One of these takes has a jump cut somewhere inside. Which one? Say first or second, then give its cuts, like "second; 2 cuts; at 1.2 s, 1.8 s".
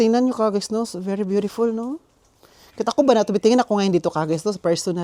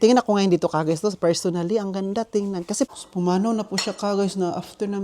second; 1 cut; at 2.9 s